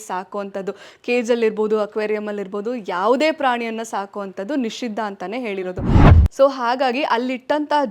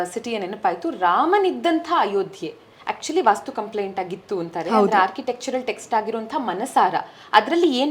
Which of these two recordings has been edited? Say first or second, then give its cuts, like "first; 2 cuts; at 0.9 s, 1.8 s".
first; 1 cut; at 6.1 s